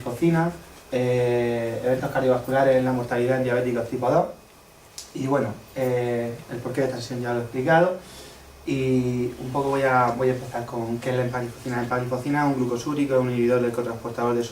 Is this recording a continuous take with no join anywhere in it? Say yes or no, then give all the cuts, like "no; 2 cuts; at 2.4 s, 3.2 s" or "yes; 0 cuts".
no; 1 cut; at 1.9 s